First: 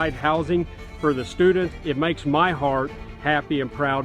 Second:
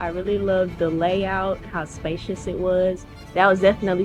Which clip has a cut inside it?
first; 1 cut; at 1.8 s

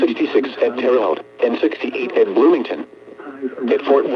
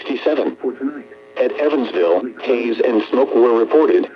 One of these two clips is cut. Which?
second; 1 cut; at 2.4 s

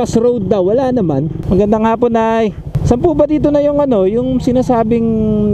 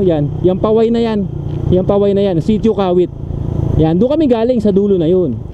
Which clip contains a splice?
first; 2 cuts; at 1.3 s, 2.8 s

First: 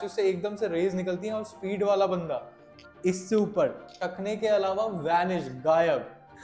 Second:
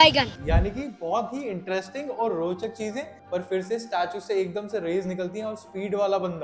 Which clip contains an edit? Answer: second; 1 cut; at 3.1 s

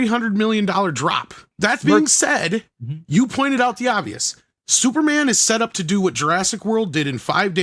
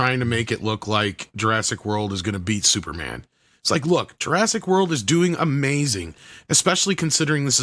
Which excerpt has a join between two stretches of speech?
first; 1 cut; at 1.4 s

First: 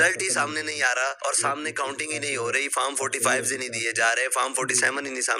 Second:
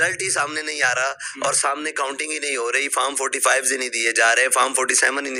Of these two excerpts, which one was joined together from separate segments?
first; 1 cut; at 1.2 s

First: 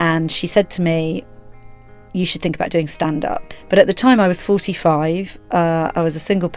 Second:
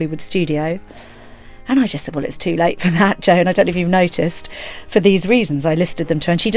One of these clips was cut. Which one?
first; 1 cut; at 3.5 s

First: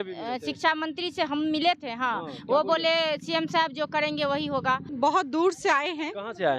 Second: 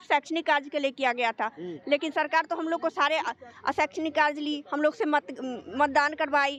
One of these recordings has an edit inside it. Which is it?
first; 1 cut; at 4.9 s

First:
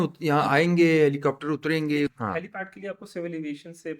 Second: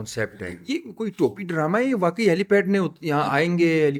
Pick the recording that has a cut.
first; 1 cut; at 2.2 s

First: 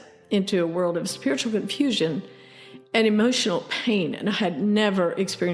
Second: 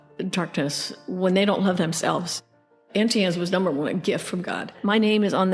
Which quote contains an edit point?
second; 2 cuts; at 2.7 s, 4.7 s

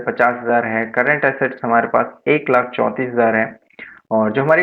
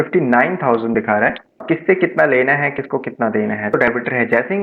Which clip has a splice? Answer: second; 2 cuts; at 1.6 s, 3.7 s

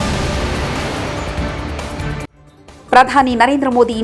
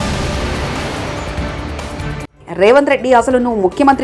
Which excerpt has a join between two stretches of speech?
first; 1 cut; at 2.3 s

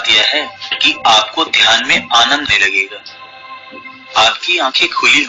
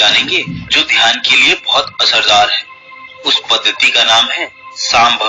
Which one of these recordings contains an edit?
first; 1 cut; at 2.5 s

